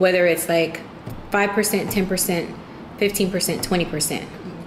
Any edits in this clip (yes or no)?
no